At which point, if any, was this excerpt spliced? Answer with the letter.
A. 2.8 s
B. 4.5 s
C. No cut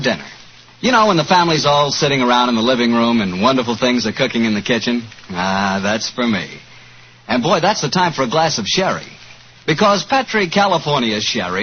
A